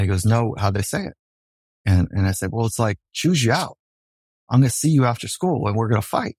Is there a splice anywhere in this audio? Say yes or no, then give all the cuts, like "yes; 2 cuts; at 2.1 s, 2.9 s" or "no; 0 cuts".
yes; 1 cut; at 4.3 s